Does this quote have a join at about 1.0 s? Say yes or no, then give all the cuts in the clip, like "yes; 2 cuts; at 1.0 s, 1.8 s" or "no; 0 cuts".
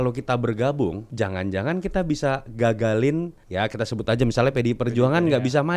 yes; 2 cuts; at 1.0 s, 3.4 s